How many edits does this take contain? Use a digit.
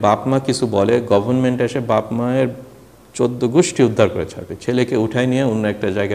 0